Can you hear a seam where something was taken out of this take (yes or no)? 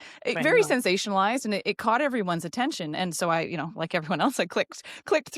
no